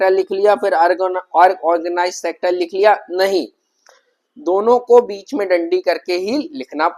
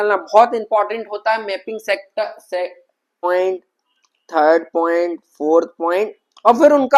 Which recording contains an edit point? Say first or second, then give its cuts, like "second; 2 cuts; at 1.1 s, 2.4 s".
second; 1 cut; at 3.2 s